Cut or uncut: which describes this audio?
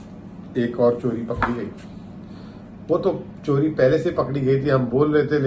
uncut